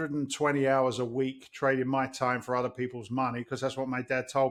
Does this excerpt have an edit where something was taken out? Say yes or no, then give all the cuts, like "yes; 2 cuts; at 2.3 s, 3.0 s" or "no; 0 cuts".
no; 0 cuts